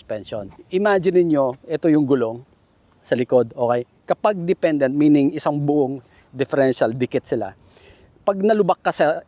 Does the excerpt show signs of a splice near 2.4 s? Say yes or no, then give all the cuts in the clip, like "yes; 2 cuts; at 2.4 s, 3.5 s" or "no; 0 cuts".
no; 0 cuts